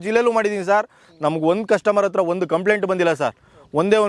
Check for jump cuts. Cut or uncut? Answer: uncut